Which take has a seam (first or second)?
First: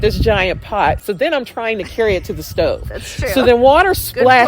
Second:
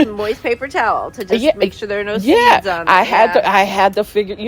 first